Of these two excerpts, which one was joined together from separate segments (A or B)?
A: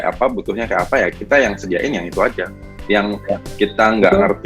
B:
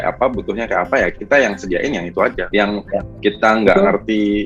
B